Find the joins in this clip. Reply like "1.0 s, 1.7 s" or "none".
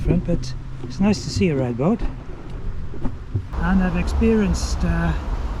3.5 s